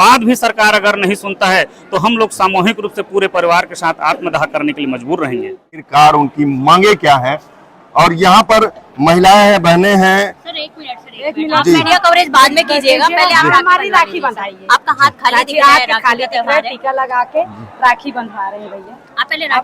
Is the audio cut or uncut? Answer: cut